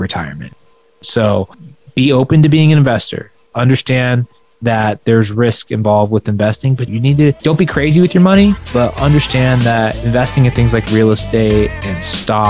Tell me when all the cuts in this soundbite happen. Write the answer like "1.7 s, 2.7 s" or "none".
none